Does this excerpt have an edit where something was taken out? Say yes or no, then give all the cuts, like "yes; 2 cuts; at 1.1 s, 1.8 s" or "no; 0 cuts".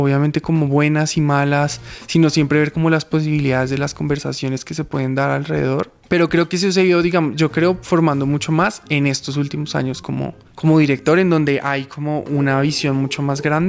no; 0 cuts